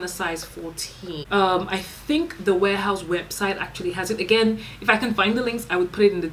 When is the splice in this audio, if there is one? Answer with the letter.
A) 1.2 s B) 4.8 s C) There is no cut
A